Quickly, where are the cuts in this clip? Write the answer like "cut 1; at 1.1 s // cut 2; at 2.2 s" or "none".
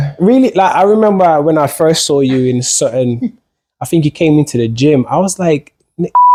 none